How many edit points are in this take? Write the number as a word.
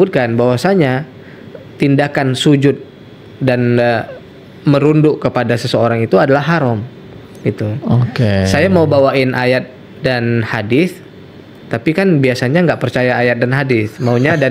zero